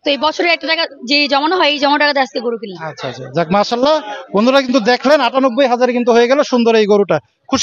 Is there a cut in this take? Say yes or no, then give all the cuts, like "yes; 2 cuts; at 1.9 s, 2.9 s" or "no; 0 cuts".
no; 0 cuts